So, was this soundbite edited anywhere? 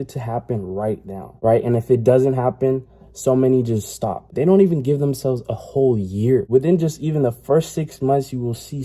yes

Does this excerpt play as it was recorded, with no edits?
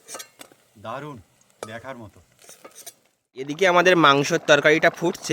no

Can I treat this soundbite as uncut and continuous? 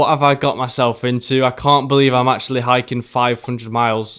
yes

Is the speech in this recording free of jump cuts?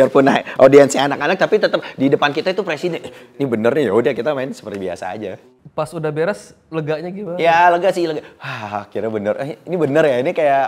yes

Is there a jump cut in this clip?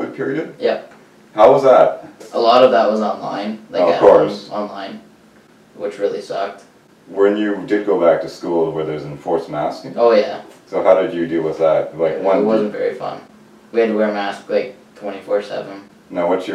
yes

